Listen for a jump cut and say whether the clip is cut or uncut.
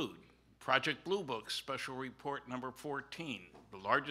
cut